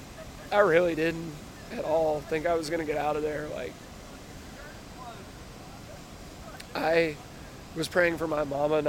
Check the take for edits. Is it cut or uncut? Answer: uncut